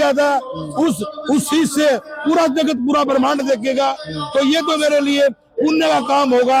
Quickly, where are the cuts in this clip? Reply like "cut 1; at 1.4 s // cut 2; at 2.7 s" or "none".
none